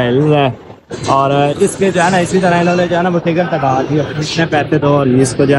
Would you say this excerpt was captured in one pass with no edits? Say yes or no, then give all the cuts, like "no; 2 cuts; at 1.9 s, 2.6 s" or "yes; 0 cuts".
yes; 0 cuts